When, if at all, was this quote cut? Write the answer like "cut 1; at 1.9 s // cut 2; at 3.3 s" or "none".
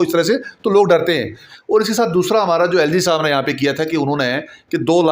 cut 1; at 1.4 s